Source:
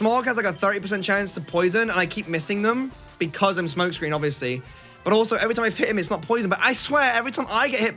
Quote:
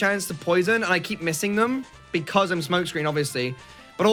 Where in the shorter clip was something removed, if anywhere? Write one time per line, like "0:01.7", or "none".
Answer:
none